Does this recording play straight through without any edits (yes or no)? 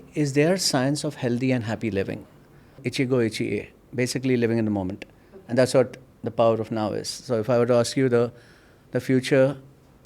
no